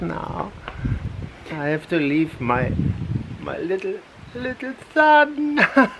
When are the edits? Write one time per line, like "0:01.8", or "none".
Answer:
none